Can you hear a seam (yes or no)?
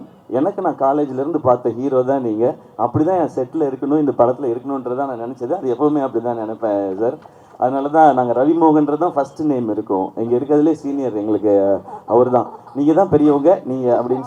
no